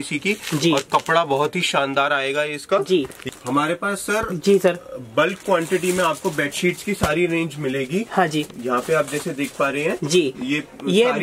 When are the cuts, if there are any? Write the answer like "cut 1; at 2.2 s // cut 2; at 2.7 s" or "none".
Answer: cut 1; at 3.2 s